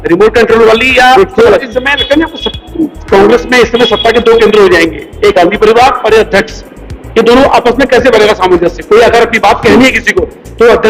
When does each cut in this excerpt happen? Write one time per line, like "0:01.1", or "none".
0:01.7